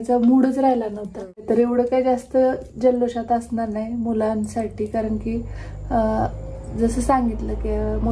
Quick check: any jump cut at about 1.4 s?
yes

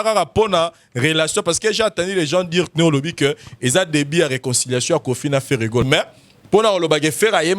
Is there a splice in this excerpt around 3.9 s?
no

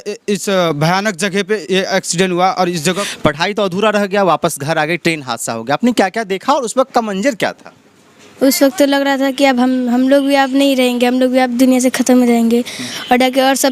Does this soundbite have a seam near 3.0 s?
yes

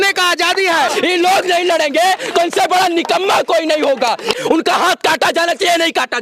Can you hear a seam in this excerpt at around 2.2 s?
no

